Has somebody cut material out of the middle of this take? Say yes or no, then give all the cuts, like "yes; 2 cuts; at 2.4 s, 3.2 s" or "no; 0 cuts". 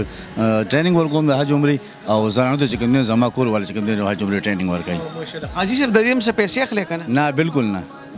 no; 0 cuts